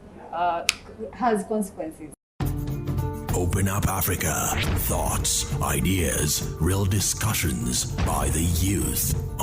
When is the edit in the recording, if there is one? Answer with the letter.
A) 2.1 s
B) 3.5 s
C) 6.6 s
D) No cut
A